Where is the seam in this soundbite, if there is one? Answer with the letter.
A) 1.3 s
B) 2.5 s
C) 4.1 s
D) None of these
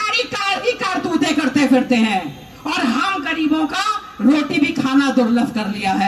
D